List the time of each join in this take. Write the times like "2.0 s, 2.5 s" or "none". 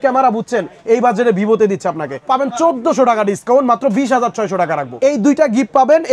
2.2 s, 4.8 s